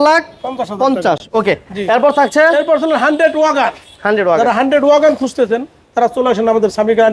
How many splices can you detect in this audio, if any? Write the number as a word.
zero